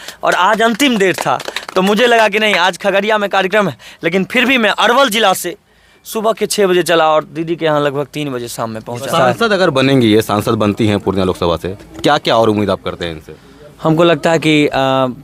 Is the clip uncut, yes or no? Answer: yes